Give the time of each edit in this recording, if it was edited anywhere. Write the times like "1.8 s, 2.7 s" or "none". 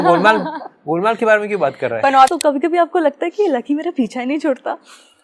2.3 s